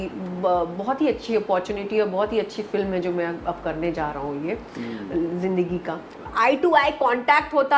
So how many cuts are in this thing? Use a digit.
1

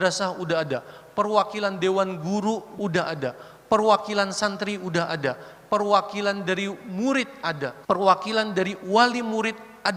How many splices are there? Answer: 2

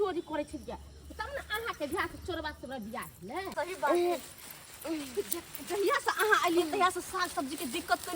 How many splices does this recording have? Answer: 1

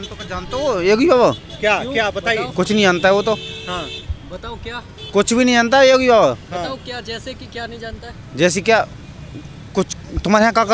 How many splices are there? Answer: 0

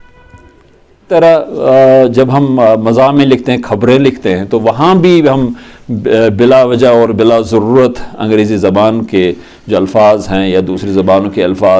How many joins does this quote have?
1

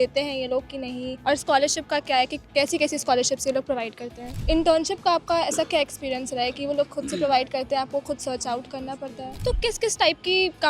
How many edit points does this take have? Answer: 3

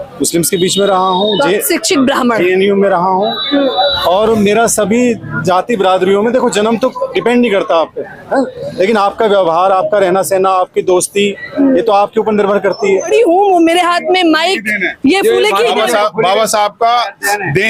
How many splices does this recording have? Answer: 1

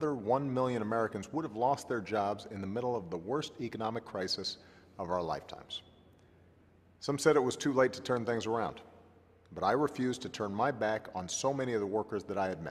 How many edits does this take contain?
1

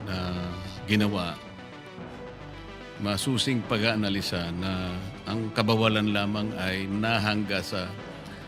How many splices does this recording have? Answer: 0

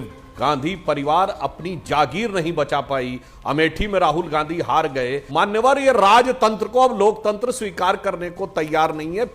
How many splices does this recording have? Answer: 1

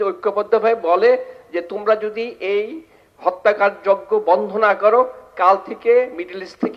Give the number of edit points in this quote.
0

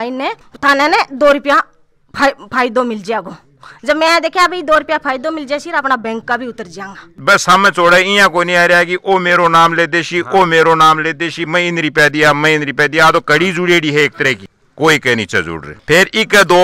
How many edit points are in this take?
2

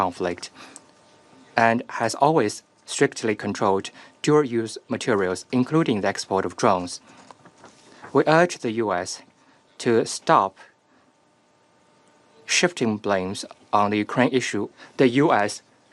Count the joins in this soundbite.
1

